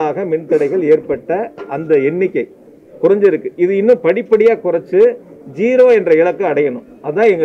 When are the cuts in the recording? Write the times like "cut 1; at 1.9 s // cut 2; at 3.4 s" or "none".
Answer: none